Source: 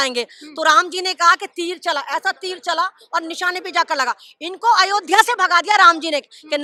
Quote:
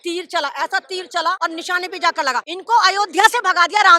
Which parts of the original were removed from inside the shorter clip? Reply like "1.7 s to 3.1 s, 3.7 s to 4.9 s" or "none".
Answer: 2.9 s to 3.1 s, 4.3 s to 4.5 s

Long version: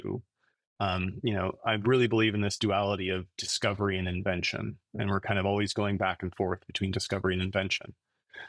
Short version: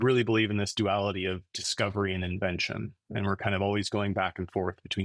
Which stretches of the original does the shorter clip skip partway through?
none

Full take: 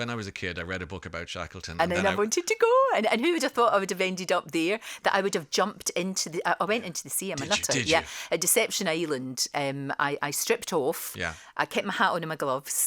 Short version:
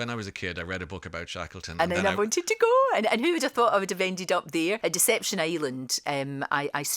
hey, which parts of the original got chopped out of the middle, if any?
4.8 s to 8.3 s

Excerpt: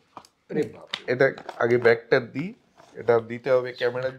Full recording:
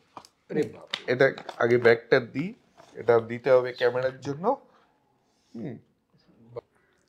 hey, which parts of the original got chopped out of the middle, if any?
none

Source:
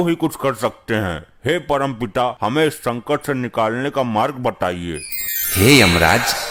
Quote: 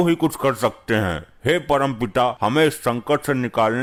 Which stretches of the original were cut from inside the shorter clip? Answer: none

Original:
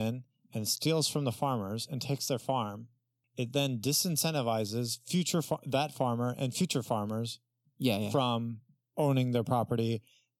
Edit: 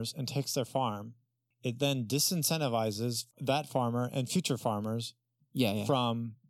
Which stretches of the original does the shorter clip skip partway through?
5.1 s to 5.6 s

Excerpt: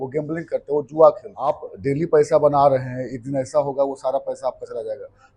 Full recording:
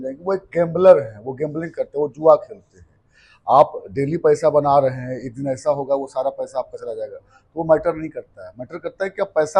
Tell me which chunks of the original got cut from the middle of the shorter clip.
3.0 s to 3.8 s

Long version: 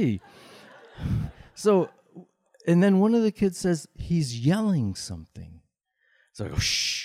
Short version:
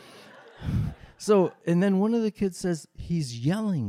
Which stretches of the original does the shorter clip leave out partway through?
1.9 s to 2.6 s

